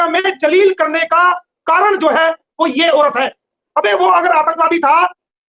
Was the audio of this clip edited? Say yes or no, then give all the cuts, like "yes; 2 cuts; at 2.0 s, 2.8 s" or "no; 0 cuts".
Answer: yes; 1 cut; at 3.6 s